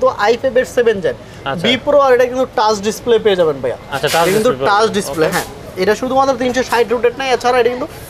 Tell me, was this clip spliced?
no; 0 cuts

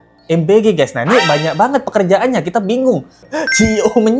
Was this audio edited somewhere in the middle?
yes; 1 cut; at 3.3 s

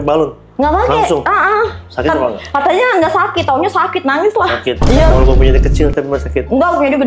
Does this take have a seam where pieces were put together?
no; 0 cuts

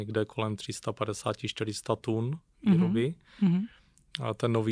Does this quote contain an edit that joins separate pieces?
no; 0 cuts

